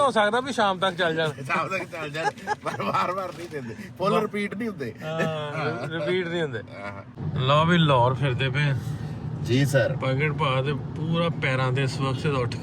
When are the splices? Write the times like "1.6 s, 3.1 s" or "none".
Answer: 7.2 s